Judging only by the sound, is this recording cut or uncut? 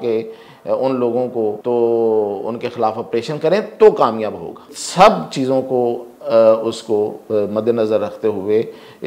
cut